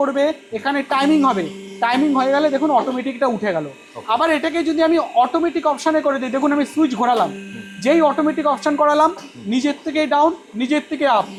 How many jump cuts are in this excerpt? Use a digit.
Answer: 0